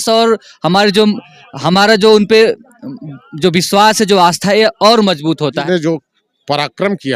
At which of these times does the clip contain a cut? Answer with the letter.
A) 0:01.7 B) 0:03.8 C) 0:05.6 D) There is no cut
C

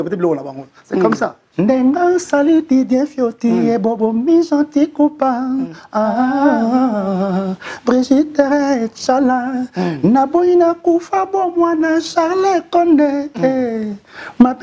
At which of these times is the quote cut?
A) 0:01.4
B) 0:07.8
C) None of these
A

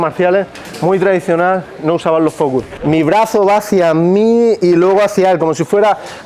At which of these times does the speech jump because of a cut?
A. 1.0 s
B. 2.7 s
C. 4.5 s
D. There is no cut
B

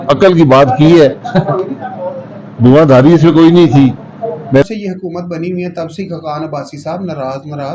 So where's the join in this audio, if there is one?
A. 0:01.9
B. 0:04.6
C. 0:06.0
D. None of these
B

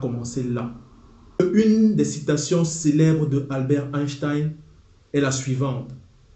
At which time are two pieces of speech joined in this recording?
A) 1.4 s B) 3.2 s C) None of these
A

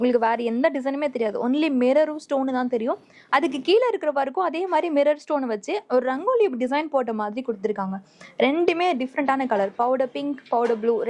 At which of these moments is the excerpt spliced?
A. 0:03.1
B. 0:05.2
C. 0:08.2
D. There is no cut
D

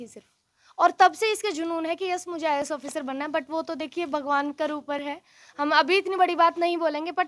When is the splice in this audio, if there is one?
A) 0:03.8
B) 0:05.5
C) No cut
C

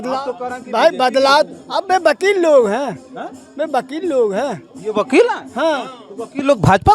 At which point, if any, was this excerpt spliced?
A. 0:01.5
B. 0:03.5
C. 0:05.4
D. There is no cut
D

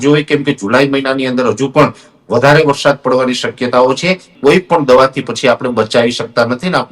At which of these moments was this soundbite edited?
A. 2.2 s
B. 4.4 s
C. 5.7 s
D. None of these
B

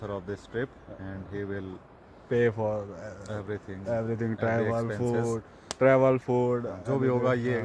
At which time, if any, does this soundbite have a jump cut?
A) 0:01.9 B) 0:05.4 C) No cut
C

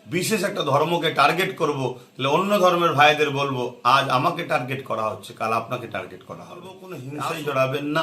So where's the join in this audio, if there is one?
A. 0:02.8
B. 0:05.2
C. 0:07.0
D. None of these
C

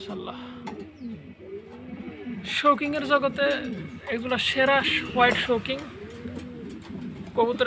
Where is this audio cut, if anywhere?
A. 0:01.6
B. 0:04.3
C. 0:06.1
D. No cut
D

